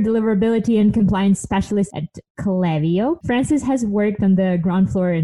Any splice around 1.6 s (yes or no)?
no